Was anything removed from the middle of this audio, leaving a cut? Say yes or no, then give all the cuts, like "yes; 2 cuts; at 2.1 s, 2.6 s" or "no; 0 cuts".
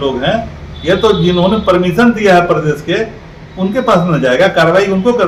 no; 0 cuts